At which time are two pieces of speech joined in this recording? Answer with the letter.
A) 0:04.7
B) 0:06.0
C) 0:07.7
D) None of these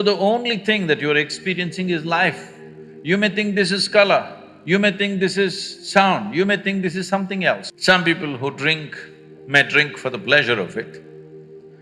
C